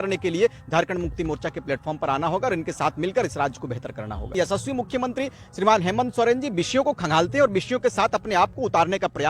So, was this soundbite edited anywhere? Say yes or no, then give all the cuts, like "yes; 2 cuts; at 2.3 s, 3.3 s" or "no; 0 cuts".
yes; 1 cut; at 4.3 s